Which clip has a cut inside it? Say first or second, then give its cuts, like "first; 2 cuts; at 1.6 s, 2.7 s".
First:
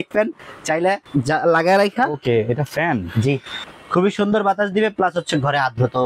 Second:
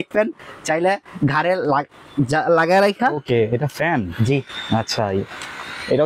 first; 2 cuts; at 1.0 s, 3.5 s